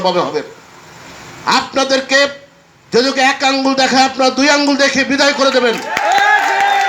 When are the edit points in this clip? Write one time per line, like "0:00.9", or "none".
none